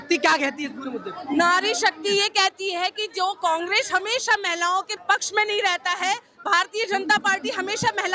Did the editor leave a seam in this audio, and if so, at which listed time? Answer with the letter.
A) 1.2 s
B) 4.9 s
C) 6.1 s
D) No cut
B